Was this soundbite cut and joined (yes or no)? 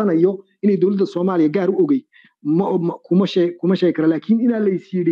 no